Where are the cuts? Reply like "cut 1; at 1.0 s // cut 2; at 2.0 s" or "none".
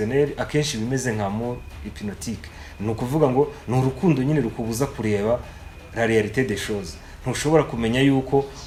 none

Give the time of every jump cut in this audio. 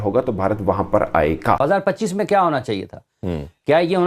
cut 1; at 1.6 s

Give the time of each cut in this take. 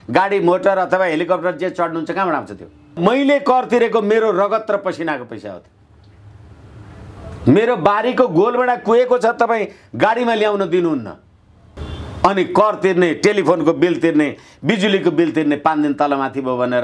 cut 1; at 3.0 s

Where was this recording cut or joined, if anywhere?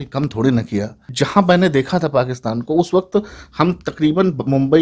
cut 1; at 1.0 s

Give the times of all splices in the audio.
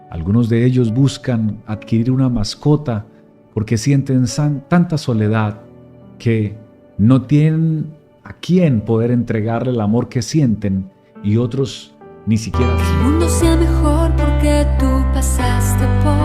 cut 1; at 12.7 s

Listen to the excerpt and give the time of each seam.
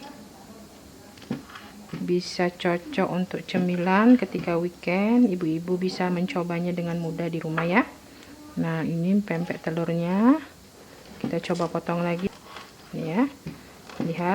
cut 1; at 12.3 s

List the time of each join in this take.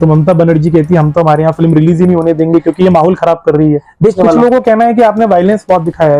cut 1; at 4.1 s

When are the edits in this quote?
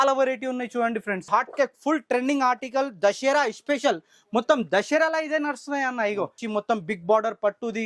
cut 1; at 1.3 s // cut 2; at 6.4 s

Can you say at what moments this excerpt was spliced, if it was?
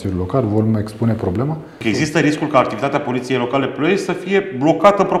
cut 1; at 1.8 s

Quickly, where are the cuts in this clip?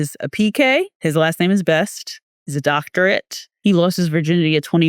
cut 1; at 0.9 s // cut 2; at 3.4 s

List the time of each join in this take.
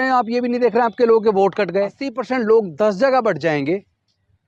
cut 1; at 2.1 s

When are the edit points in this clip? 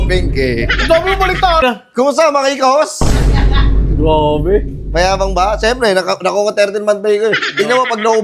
cut 1; at 1.6 s

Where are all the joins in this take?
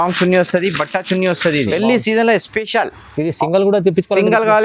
cut 1; at 1.7 s

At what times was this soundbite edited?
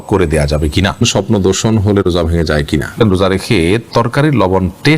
cut 1; at 1.1 s // cut 2; at 3.0 s

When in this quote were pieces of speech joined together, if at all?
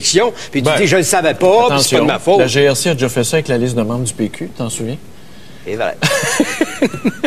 cut 1; at 1.4 s

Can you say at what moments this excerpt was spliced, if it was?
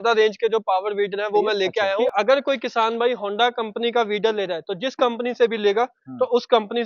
cut 1; at 2.1 s

